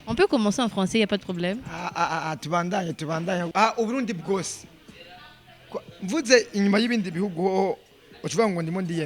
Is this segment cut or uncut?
cut